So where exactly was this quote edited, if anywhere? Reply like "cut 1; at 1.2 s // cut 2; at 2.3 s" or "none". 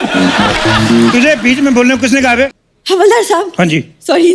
cut 1; at 2.5 s